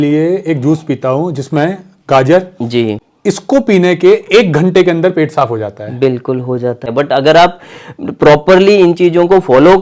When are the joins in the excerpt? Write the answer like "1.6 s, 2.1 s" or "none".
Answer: 3.0 s, 6.8 s